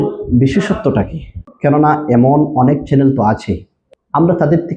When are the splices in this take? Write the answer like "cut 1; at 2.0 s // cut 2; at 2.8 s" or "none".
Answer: none